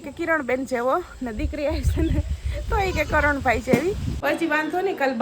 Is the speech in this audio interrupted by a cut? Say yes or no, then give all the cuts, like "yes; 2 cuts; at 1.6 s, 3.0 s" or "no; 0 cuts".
yes; 1 cut; at 4.1 s